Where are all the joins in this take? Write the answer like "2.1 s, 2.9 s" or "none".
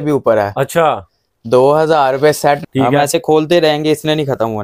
2.6 s

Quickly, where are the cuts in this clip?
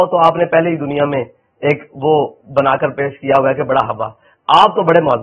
none

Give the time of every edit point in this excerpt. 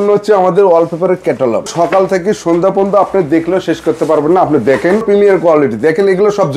1.7 s, 5.0 s

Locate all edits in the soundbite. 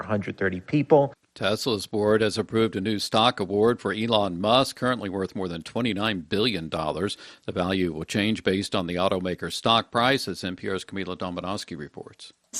1.3 s

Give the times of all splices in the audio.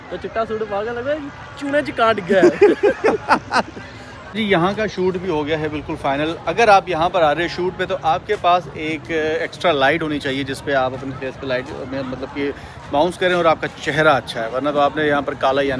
none

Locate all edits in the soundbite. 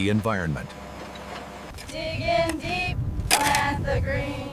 1.7 s

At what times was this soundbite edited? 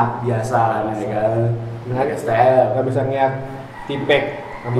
none

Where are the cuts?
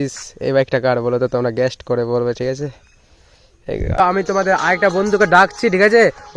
4.0 s

